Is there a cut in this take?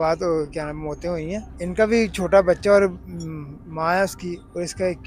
yes; 1 cut; at 1.5 s

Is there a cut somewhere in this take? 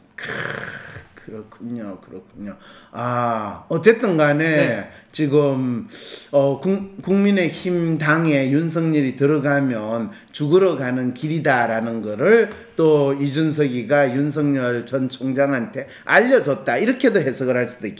no; 0 cuts

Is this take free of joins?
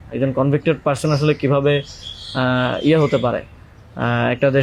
yes; 0 cuts

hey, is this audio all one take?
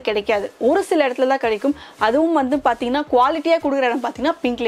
yes; 0 cuts

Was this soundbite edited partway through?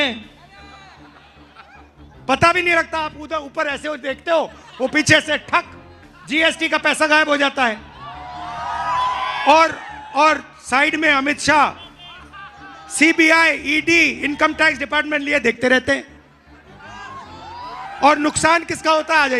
no; 0 cuts

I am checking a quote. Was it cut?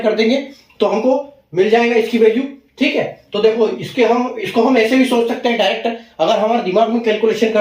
no; 0 cuts

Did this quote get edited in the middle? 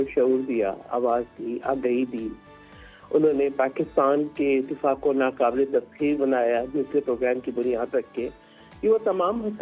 no; 0 cuts

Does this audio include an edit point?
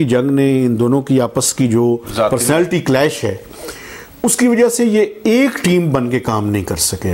no; 0 cuts

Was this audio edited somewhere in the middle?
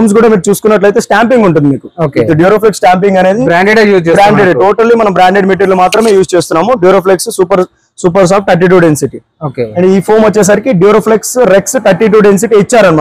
no; 0 cuts

